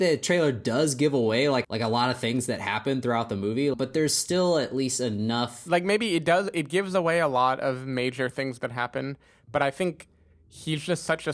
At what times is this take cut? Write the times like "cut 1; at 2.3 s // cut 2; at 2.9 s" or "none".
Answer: cut 1; at 1.7 s // cut 2; at 3.7 s // cut 3; at 5.6 s